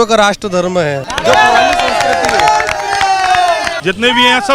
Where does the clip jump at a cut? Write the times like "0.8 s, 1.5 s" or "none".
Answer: 1.0 s, 3.7 s